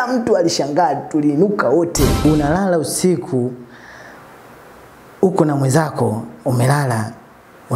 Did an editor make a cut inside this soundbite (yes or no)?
yes